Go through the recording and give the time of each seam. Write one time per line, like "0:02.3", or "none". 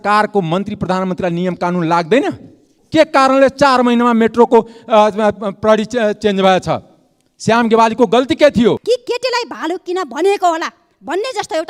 0:08.8